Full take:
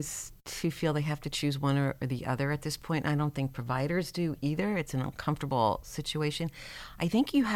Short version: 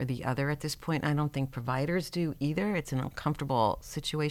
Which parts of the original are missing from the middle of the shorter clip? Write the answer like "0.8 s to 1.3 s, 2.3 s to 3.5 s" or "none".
none